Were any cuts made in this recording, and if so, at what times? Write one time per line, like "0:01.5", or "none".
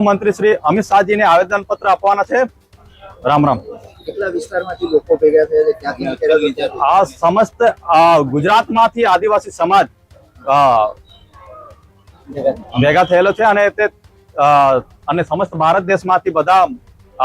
none